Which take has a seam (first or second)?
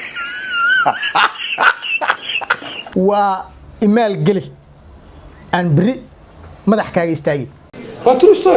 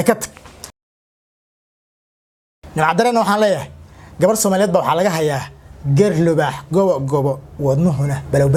first